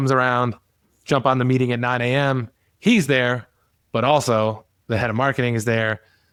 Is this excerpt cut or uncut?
uncut